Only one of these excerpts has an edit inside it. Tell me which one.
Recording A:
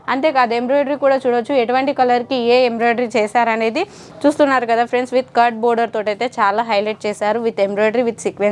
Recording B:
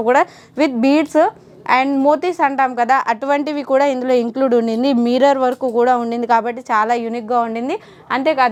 A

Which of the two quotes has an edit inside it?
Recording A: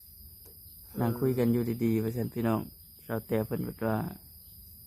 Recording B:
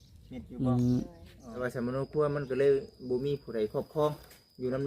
B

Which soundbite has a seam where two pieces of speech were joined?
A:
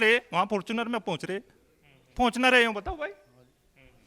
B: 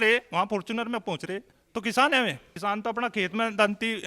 B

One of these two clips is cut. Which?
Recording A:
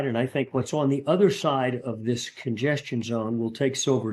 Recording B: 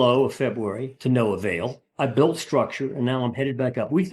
B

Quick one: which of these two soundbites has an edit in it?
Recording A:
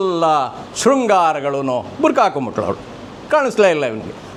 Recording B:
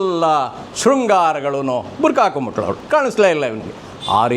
B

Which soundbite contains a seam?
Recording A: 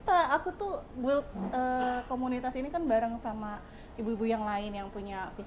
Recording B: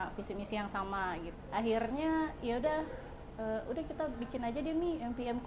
B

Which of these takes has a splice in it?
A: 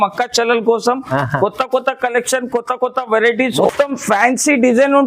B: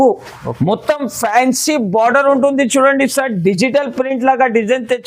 A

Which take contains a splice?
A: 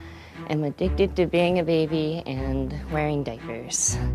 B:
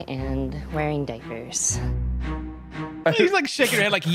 B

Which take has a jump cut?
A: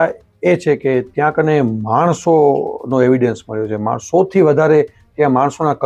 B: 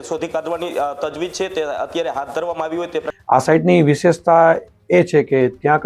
B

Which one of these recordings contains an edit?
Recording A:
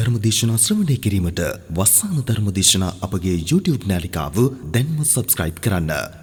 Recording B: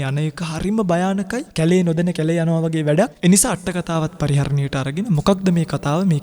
B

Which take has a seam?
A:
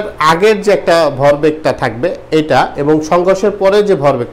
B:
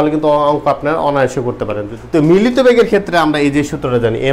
B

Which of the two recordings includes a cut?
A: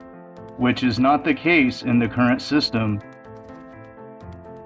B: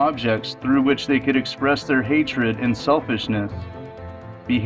B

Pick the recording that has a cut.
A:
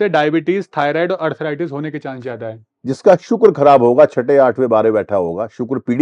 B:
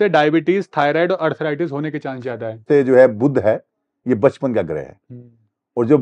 B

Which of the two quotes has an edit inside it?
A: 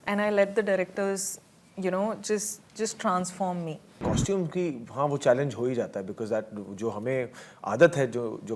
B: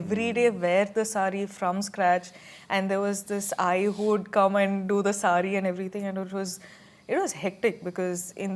A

